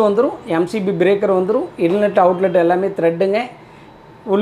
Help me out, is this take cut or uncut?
uncut